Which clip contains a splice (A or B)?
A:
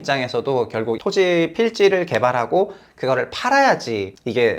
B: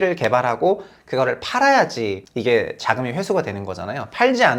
A